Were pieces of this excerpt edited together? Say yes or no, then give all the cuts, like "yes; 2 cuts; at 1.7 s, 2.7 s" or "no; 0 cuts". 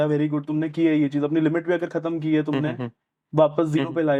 no; 0 cuts